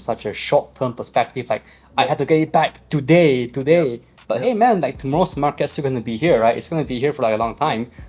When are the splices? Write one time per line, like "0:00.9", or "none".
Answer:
none